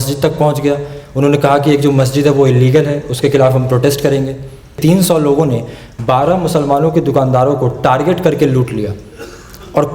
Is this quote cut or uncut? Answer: cut